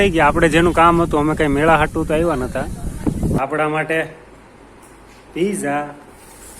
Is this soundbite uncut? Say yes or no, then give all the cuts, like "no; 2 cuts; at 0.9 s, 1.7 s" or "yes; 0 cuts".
no; 1 cut; at 3.4 s